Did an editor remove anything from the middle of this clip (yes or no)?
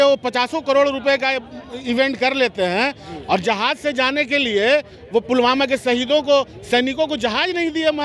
no